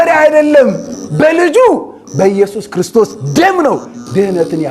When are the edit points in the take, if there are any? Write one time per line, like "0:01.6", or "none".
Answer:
none